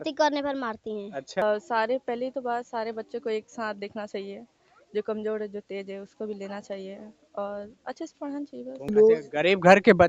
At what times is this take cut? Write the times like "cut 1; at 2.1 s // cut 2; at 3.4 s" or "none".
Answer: cut 1; at 1.4 s // cut 2; at 8.9 s